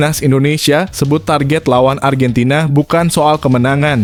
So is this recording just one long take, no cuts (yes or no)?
yes